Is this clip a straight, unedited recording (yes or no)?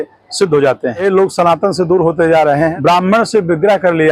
no